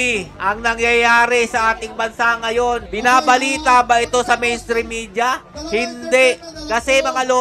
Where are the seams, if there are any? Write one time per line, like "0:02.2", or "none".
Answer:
none